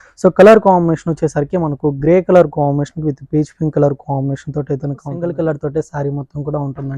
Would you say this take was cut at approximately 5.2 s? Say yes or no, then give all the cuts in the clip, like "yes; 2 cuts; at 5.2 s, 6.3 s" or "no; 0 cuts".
yes; 1 cut; at 5.2 s